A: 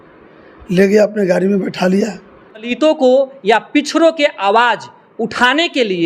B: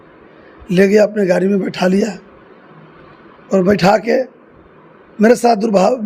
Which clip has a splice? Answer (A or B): A